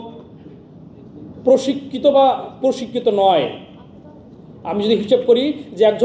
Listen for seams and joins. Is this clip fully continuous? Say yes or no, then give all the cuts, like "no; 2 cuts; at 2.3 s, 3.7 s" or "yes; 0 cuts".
yes; 0 cuts